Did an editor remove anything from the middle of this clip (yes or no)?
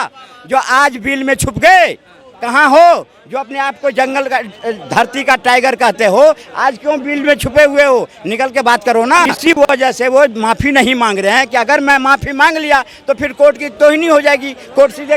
yes